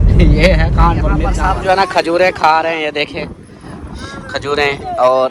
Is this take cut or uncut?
cut